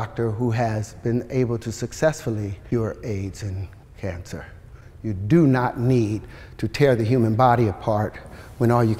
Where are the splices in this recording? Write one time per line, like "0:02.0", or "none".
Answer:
0:02.6